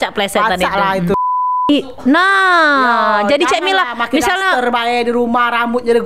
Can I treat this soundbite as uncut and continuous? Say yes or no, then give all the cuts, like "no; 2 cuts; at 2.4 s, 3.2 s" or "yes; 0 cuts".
no; 1 cut; at 1.1 s